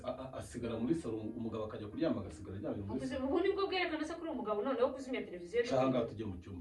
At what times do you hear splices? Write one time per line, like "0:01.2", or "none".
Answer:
none